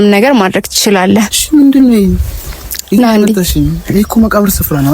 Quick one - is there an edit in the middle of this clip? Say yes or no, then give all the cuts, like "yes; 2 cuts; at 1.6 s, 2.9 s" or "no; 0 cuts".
yes; 1 cut; at 1.4 s